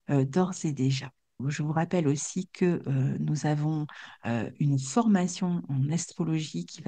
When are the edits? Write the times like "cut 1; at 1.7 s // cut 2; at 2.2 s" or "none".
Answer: cut 1; at 1.4 s